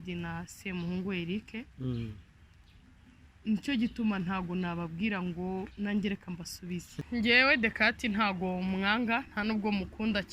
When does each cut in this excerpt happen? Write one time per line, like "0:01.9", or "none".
0:06.9